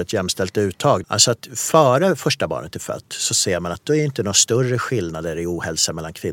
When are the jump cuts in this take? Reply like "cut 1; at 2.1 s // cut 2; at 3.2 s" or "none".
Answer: cut 1; at 1.0 s